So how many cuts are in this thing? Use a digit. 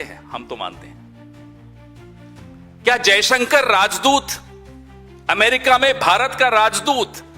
2